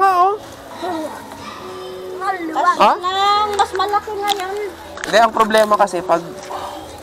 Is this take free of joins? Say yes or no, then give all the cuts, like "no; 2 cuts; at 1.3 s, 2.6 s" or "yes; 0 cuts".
yes; 0 cuts